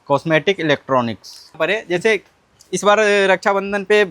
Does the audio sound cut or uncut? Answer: cut